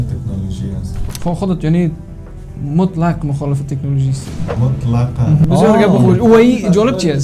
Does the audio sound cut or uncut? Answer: cut